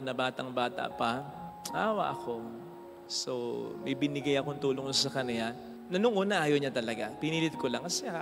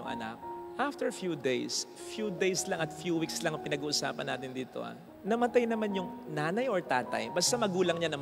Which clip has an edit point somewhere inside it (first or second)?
first